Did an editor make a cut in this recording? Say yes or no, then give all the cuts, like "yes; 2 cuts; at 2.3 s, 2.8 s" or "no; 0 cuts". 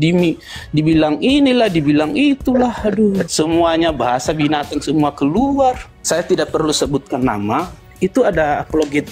yes; 2 cuts; at 3.3 s, 5.9 s